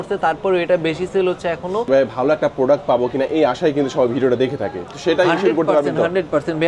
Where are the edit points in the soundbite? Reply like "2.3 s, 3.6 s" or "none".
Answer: 1.9 s